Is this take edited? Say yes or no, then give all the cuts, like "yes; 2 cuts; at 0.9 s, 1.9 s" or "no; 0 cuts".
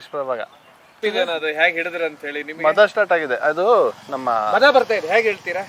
yes; 1 cut; at 1.0 s